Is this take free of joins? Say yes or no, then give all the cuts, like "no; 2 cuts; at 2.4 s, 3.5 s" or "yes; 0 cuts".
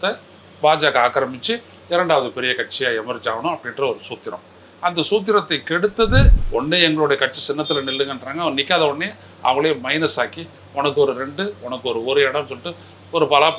no; 1 cut; at 6.4 s